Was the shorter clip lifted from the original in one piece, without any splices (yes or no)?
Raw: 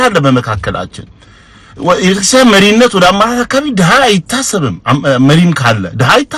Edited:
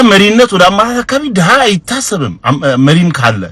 yes